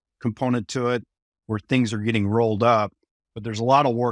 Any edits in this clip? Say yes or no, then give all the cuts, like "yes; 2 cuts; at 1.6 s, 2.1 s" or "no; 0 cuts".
no; 0 cuts